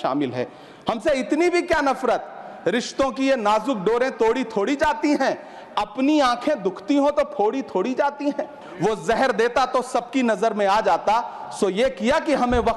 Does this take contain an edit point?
yes; 1 cut; at 8.6 s

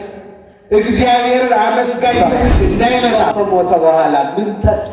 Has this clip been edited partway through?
yes; 1 cut; at 3.3 s

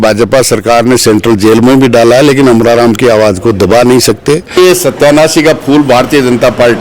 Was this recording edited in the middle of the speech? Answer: yes; 1 cut; at 4.6 s

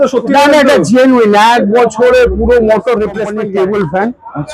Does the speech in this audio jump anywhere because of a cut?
yes; 1 cut; at 3.3 s

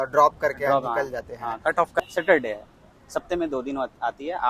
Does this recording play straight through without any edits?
no; 1 cut; at 2.0 s

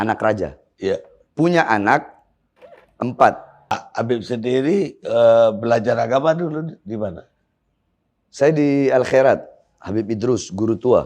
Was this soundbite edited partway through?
yes; 1 cut; at 3.8 s

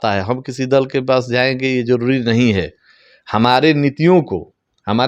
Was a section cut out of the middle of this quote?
no; 0 cuts

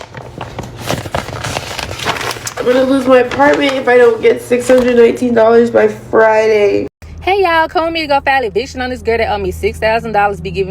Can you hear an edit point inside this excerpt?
yes; 1 cut; at 7.0 s

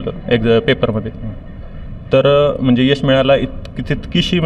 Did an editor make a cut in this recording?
no; 0 cuts

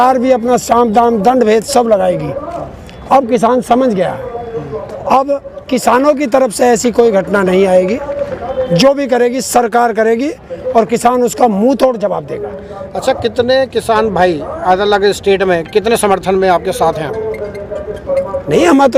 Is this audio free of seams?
yes; 0 cuts

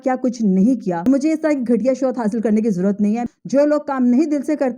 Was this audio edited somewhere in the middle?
yes; 2 cuts; at 1.1 s, 3.2 s

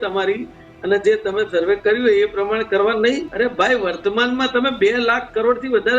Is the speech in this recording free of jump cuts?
no; 1 cut; at 3.3 s

